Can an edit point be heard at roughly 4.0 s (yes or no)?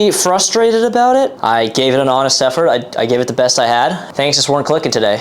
yes